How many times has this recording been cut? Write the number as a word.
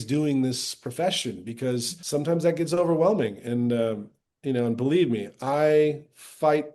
one